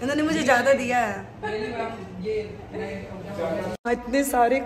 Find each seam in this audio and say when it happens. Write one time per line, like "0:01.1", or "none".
0:03.7

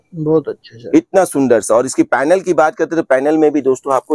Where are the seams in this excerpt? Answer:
none

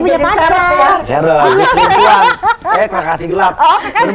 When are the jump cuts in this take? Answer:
none

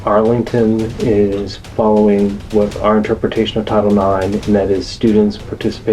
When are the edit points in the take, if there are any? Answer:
0:01.6

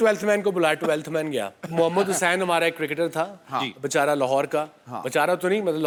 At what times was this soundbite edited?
none

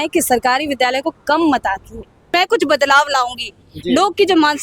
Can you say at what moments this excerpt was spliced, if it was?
0:02.3

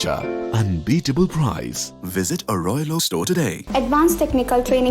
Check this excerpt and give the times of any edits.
0:03.6

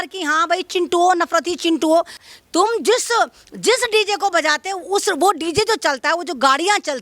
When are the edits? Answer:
0:02.2

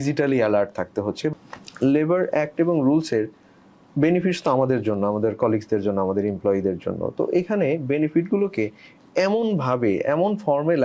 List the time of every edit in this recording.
0:01.3

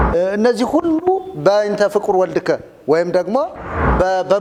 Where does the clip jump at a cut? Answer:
none

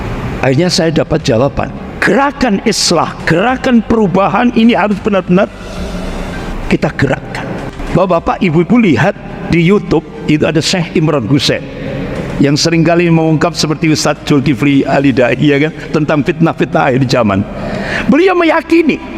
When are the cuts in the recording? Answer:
0:01.9
0:07.7

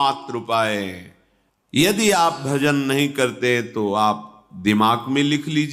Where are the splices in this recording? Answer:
0:01.8

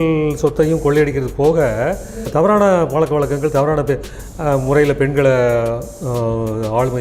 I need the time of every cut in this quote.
0:02.2

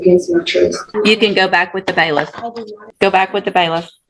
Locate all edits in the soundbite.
0:00.8
0:02.9

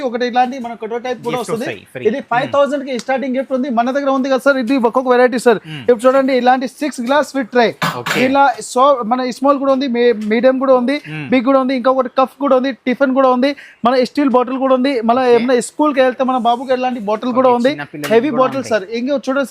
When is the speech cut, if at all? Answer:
none

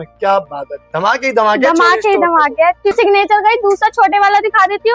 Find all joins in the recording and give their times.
0:02.9

